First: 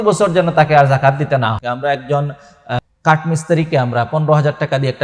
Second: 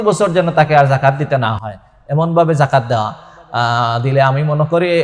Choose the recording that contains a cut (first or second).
first